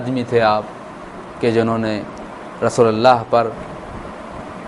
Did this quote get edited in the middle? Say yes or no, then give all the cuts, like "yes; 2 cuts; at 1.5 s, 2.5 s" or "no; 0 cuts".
no; 0 cuts